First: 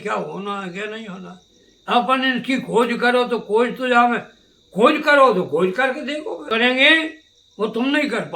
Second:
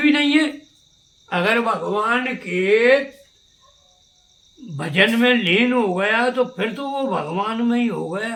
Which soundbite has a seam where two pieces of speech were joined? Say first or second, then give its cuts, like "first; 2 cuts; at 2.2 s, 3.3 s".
first; 1 cut; at 6.5 s